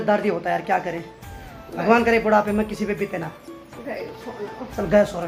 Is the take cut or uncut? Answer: uncut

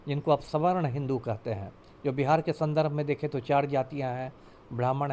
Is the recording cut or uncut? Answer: uncut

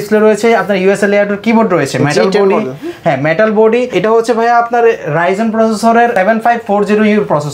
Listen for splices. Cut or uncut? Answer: uncut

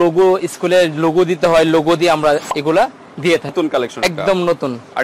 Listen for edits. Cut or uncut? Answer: cut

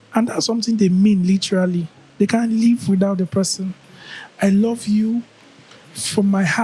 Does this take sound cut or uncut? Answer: uncut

